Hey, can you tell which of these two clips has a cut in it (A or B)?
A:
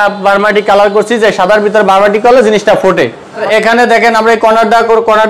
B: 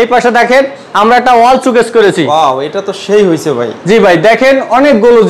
A